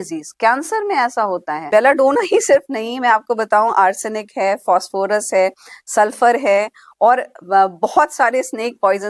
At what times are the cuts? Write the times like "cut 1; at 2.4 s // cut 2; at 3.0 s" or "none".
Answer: cut 1; at 1.7 s